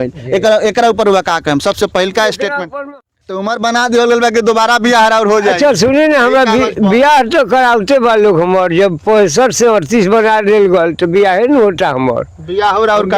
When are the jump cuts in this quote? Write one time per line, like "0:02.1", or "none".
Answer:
0:02.6